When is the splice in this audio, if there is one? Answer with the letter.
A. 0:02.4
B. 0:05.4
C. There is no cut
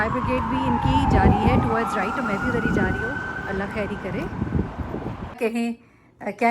B